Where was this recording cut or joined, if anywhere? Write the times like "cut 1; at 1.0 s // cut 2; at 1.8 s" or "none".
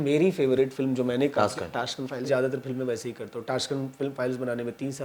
cut 1; at 2.3 s